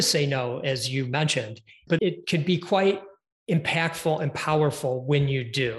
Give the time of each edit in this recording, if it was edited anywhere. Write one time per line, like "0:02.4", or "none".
0:01.9